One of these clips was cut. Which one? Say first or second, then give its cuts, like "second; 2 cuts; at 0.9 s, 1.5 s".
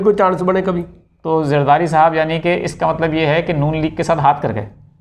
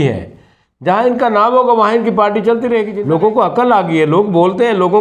second; 1 cut; at 2.9 s